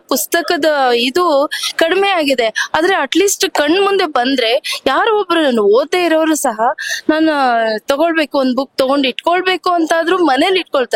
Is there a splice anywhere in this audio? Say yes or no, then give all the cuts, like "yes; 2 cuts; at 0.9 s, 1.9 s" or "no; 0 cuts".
no; 0 cuts